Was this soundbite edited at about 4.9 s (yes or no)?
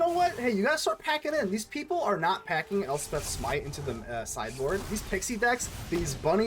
yes